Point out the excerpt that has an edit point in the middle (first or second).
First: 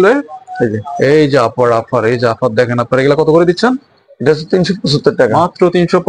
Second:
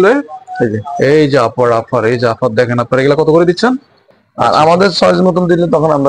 second